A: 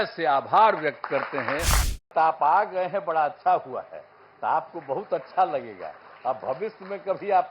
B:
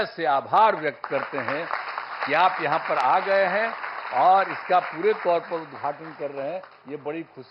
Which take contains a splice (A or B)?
A